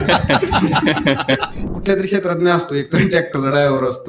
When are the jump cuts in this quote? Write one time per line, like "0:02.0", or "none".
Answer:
0:01.7